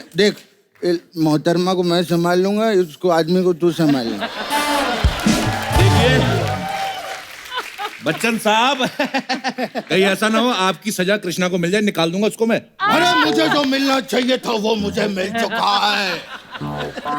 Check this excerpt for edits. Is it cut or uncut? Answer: uncut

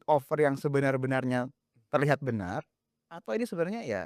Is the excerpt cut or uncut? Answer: uncut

